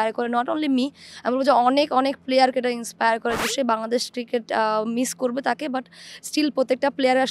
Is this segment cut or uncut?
cut